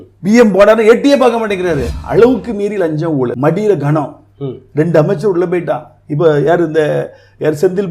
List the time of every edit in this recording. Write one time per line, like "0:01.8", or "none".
0:01.9
0:03.4